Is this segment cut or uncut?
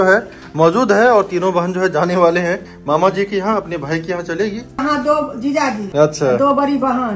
cut